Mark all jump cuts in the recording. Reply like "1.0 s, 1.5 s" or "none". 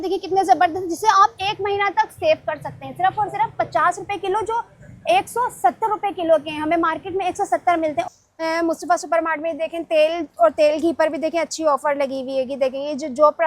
8.0 s

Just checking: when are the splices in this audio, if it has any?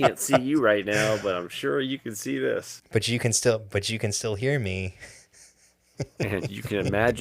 2.3 s

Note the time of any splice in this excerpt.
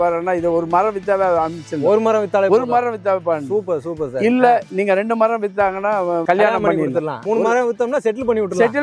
6.2 s, 7.2 s

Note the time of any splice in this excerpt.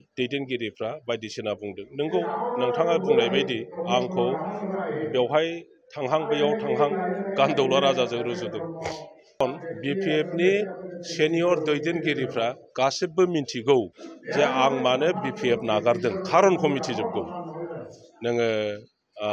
9.4 s

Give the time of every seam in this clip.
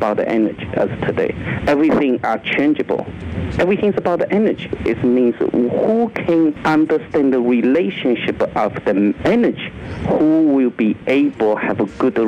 1.5 s, 4.7 s, 6.6 s, 9.2 s

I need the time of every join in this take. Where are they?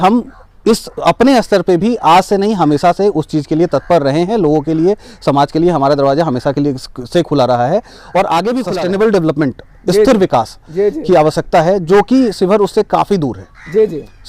8.7 s

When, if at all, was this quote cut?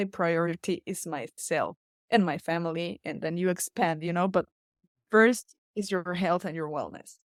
none

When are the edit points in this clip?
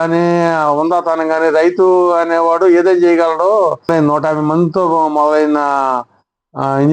3.9 s

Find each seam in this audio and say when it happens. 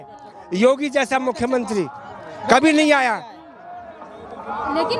none

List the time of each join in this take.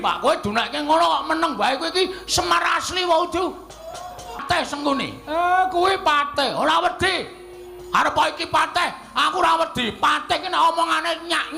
4.4 s

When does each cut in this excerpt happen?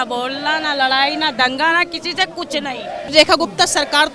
3.1 s

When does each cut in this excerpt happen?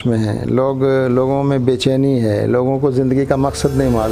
none

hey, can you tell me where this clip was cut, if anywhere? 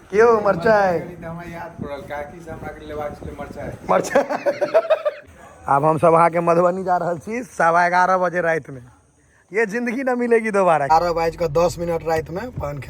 5.2 s, 10.8 s

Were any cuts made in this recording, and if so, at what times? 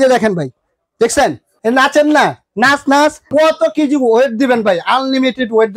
1.5 s, 3.3 s

